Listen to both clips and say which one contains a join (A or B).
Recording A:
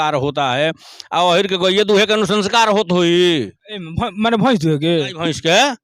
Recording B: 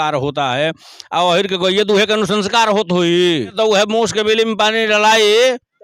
B